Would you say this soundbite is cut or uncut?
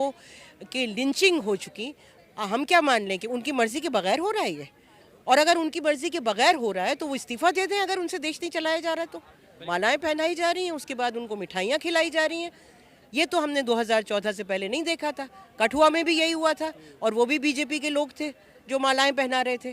cut